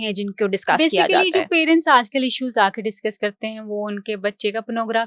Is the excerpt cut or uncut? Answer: uncut